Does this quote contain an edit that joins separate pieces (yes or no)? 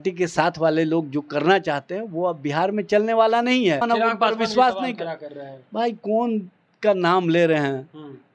yes